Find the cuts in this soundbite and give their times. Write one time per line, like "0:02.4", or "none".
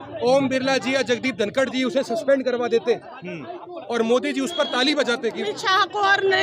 0:05.4